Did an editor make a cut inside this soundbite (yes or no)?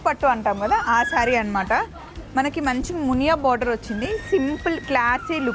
no